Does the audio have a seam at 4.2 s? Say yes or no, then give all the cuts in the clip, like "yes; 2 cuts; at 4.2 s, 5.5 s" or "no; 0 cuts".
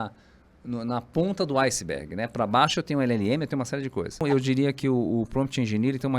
yes; 1 cut; at 4.2 s